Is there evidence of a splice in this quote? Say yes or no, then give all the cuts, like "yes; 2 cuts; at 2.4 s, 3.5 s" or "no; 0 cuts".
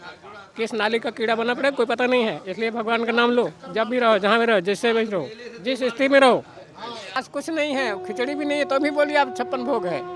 yes; 1 cut; at 7.2 s